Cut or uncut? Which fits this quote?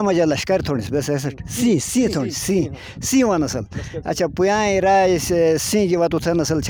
uncut